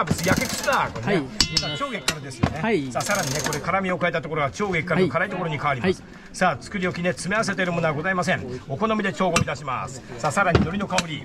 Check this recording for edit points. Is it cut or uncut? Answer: uncut